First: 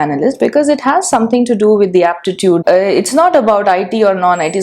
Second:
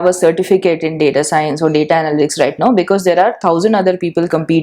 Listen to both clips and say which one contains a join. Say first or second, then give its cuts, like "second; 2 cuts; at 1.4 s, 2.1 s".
first; 1 cut; at 2.6 s